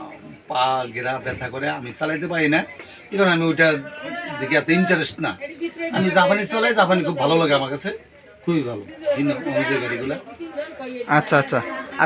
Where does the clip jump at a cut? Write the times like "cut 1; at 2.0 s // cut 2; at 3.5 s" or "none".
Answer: none